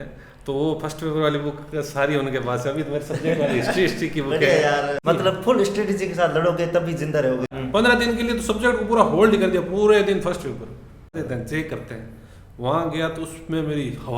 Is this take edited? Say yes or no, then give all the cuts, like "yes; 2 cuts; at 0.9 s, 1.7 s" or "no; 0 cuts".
yes; 3 cuts; at 5.0 s, 7.5 s, 11.1 s